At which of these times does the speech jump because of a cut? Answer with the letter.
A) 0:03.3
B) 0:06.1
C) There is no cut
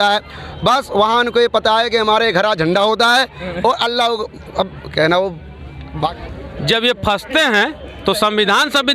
B